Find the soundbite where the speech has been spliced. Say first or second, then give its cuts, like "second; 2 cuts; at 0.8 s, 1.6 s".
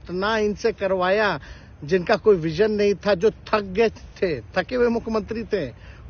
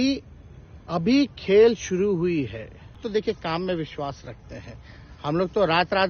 second; 1 cut; at 3.0 s